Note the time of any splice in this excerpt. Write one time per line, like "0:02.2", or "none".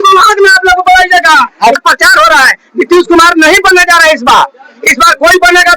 0:01.8